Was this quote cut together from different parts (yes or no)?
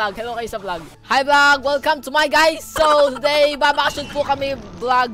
yes